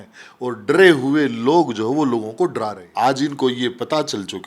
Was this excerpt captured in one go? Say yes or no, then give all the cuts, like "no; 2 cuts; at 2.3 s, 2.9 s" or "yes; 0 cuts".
no; 1 cut; at 2.8 s